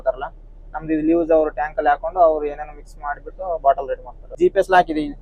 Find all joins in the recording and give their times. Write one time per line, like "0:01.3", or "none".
0:04.3